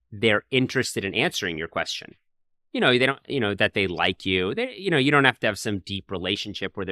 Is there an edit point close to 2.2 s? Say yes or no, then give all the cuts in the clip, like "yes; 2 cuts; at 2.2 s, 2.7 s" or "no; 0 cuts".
no; 0 cuts